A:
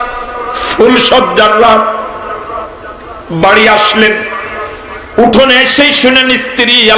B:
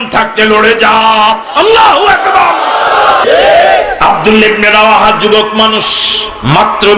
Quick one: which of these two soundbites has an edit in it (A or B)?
B